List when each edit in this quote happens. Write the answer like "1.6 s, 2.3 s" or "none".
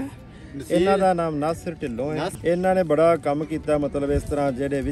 2.3 s